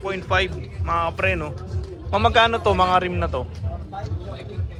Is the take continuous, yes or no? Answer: yes